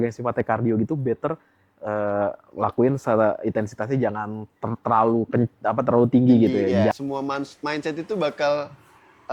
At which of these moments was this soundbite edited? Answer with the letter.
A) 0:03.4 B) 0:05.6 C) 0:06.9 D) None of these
C